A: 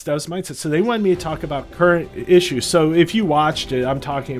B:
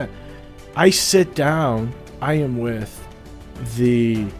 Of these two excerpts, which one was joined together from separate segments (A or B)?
A